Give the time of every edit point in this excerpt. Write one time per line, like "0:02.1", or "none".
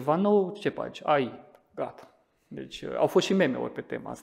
none